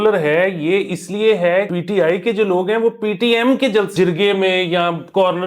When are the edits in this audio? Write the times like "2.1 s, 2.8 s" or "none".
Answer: 1.7 s, 3.9 s